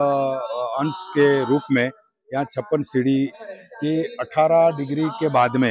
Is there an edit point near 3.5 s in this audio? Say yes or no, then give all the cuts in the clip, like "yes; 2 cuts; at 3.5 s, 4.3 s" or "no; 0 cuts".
yes; 1 cut; at 3.5 s